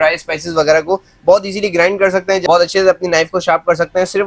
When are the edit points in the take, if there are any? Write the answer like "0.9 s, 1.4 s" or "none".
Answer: 2.4 s